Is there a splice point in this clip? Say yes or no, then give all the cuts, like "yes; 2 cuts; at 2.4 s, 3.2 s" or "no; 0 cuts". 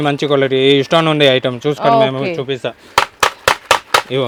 no; 0 cuts